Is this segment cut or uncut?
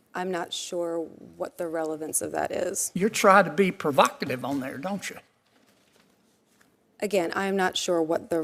uncut